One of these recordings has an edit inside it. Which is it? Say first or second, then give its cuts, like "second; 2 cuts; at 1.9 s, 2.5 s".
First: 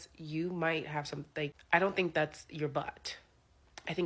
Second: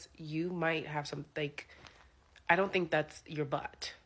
first; 1 cut; at 1.6 s